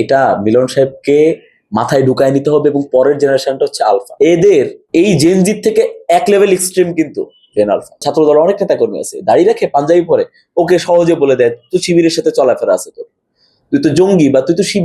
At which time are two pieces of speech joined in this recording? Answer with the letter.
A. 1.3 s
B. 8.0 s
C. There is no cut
B